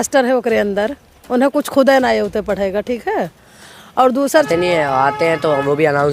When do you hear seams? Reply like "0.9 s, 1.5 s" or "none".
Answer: 4.5 s